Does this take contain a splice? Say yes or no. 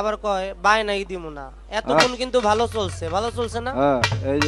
no